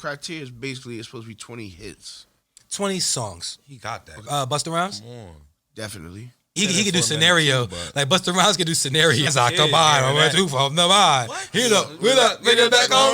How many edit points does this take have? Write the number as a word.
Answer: three